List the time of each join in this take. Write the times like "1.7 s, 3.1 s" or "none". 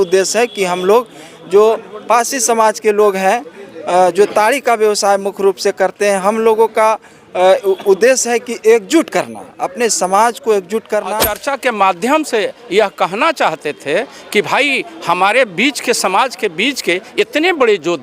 11.3 s